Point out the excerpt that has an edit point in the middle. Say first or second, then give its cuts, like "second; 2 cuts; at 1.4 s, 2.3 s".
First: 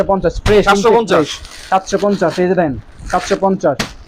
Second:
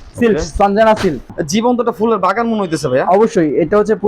second; 1 cut; at 1.3 s